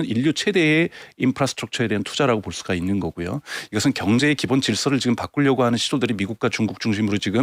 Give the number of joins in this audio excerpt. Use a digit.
0